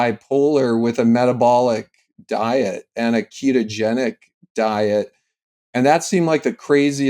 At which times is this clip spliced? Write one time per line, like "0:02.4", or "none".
none